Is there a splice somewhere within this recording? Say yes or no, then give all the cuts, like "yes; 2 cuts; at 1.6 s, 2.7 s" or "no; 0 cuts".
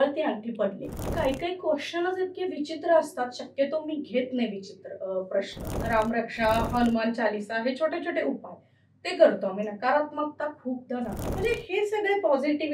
yes; 3 cuts; at 1.1 s, 5.7 s, 11.2 s